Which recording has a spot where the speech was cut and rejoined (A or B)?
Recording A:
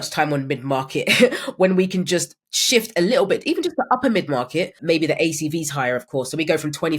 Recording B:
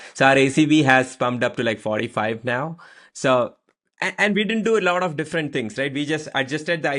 A